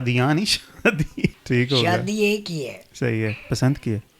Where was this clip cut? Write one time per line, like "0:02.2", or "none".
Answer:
0:01.4

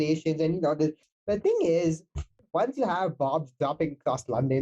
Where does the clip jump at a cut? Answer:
0:01.1
0:02.4

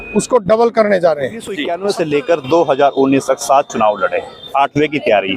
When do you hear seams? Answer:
0:01.6

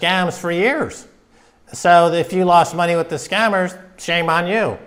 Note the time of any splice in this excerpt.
none

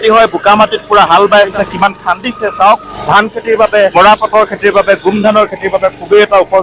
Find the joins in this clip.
0:01.5
0:02.9
0:03.9

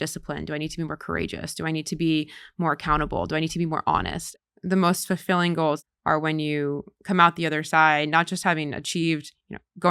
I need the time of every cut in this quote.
0:04.2
0:05.8

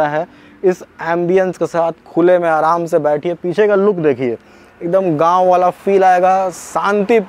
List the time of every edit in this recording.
none

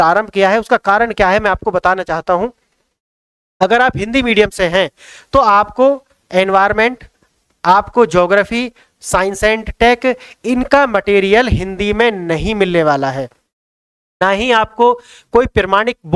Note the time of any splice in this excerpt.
none

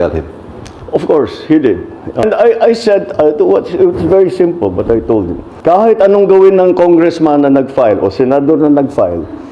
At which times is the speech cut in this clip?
0:02.2
0:05.4

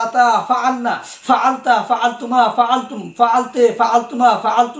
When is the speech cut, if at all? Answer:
none

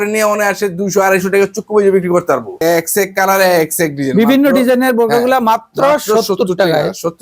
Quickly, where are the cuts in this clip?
none

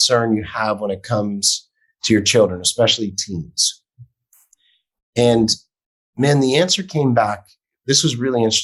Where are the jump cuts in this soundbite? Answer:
none

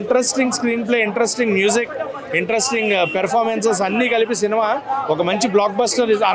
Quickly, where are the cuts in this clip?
none

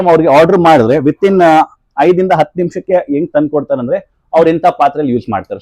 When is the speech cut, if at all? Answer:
none

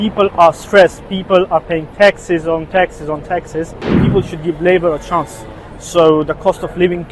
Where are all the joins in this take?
0:04.0

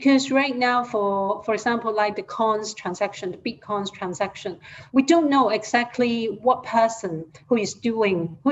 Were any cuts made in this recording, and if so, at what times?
none

